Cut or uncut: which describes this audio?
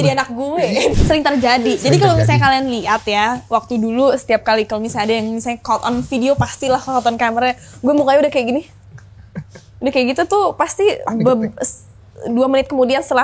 cut